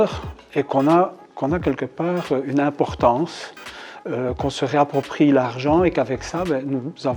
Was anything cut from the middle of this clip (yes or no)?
no